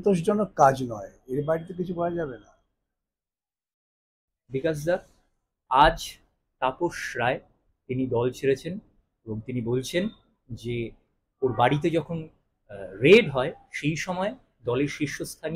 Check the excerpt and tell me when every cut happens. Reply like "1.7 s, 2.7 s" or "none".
none